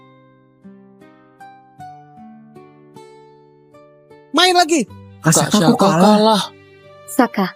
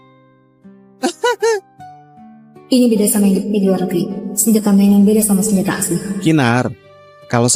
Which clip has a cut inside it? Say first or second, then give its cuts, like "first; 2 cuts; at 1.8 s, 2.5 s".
first; 1 cut; at 0.9 s